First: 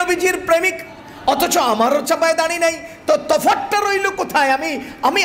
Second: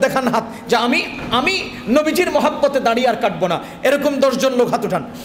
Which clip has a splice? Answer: first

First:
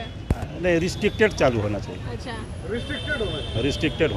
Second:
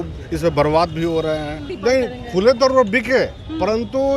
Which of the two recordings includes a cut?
second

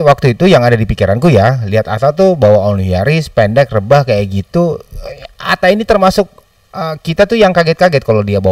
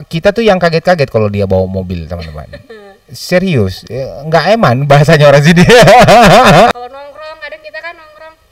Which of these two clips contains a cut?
second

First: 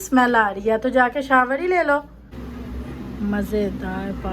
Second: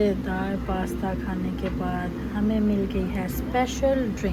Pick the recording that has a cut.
first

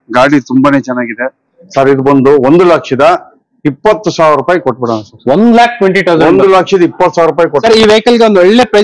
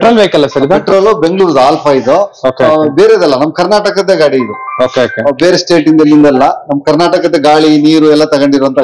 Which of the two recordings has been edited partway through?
first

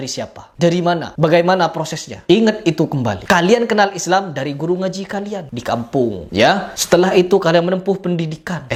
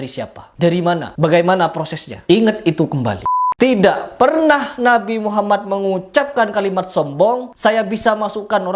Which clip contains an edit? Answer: second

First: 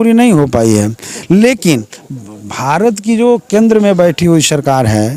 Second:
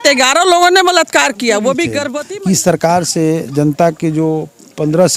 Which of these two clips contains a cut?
second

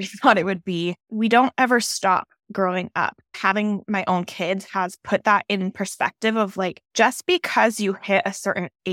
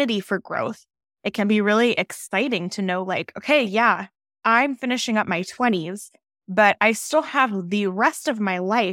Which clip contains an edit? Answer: first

